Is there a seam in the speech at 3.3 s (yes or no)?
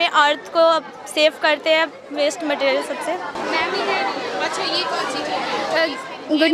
no